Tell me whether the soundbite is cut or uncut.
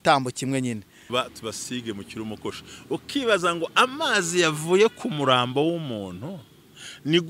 cut